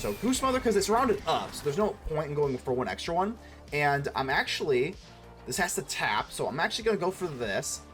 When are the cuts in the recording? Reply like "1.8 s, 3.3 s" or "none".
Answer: none